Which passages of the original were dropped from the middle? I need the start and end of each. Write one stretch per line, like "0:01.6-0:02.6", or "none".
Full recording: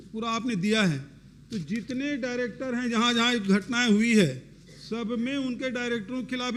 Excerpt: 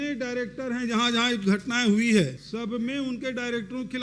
0:04.4-0:04.8